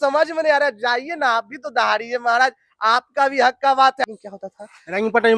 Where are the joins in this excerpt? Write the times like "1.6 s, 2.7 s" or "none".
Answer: 4.0 s